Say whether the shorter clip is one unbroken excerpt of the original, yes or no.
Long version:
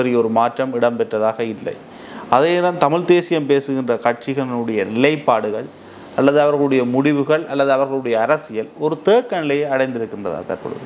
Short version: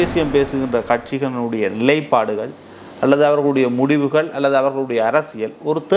yes